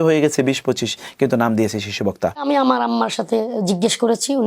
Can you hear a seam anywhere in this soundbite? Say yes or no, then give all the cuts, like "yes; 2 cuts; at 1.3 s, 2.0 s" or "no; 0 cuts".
yes; 1 cut; at 2.4 s